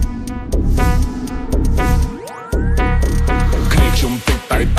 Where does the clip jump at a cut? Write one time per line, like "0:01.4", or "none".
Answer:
none